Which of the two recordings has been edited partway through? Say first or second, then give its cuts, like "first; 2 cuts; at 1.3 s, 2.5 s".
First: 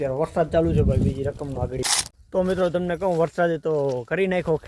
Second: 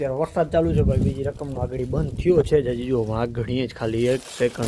first; 1 cut; at 2.2 s